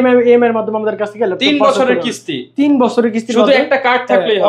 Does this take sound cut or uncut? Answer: uncut